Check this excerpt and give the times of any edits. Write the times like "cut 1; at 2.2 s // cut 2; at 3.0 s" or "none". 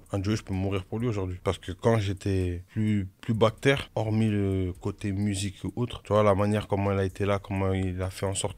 none